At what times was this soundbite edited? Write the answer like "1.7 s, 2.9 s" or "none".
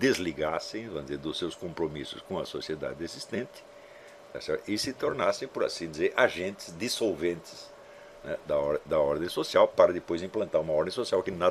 none